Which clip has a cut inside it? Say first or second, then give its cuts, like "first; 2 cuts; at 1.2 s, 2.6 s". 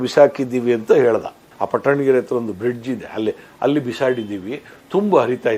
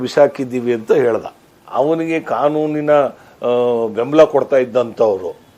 second; 1 cut; at 1.6 s